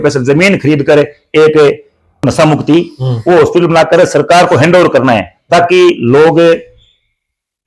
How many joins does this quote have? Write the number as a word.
one